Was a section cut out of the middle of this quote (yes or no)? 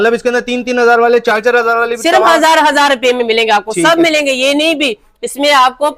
no